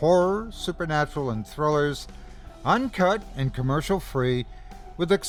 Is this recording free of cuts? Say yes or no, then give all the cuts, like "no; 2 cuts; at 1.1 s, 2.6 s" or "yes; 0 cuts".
yes; 0 cuts